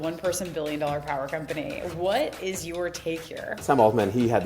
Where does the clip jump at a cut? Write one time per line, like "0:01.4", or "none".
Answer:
0:03.6